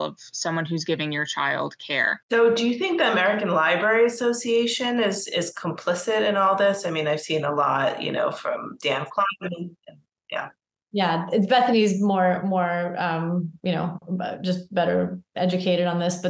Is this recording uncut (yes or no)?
no